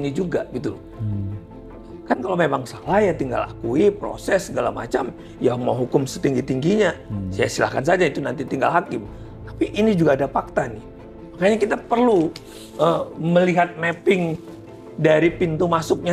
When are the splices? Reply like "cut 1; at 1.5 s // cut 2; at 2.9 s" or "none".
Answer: none